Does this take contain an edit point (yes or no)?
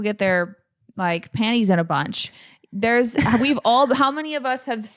no